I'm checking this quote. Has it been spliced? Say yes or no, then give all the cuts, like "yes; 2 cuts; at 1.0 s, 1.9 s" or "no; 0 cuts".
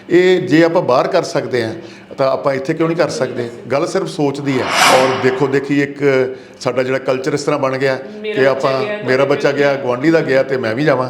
yes; 1 cut; at 4.8 s